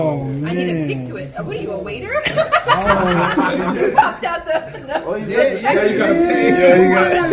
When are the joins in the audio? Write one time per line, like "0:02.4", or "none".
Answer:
none